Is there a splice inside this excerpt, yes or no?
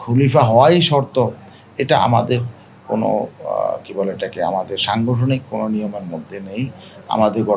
no